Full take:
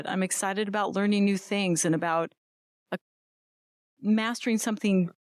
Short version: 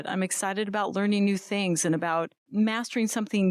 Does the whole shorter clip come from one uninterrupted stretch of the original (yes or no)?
no